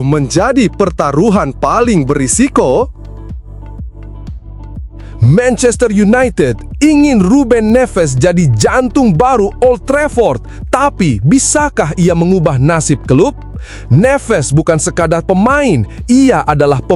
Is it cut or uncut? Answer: cut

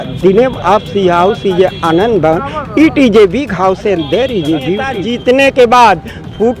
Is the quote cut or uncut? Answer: cut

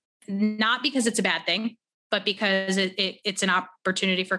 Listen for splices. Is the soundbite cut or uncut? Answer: uncut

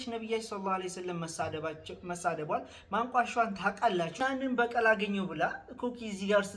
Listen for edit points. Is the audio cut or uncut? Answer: cut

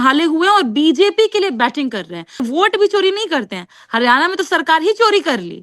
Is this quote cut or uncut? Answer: cut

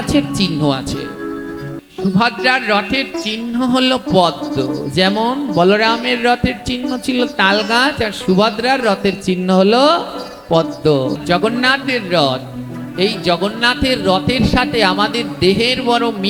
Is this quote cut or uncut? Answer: cut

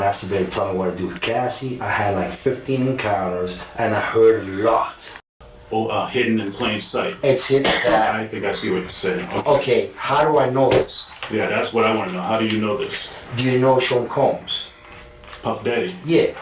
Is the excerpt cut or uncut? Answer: cut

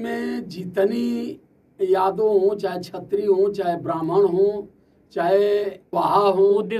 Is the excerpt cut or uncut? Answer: cut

